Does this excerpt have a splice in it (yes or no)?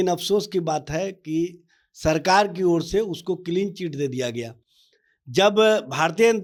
no